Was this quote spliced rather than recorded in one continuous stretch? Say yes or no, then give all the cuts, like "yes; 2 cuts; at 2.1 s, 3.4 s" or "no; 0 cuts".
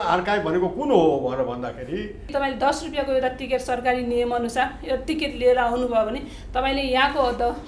yes; 1 cut; at 2.3 s